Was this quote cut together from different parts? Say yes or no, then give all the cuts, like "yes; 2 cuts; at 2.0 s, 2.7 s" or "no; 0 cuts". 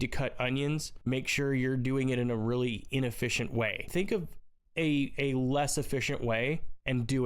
yes; 2 cuts; at 0.9 s, 3.9 s